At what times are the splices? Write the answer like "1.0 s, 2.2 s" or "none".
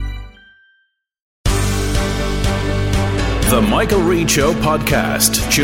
1.4 s